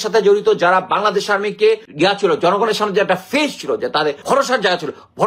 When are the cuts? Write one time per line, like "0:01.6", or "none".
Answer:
0:01.9
0:04.2

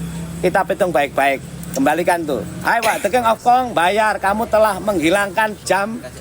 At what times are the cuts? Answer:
0:02.5

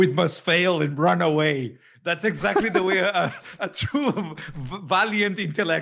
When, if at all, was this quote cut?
none

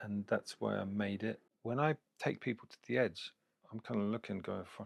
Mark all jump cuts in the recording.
0:01.5

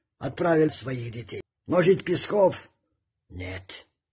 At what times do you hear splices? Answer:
none

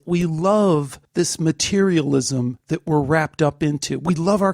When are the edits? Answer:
0:01.0
0:02.6

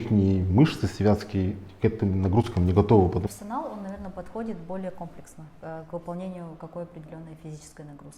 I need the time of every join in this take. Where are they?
0:03.2

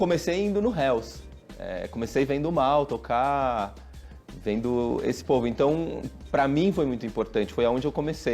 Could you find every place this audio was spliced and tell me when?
none

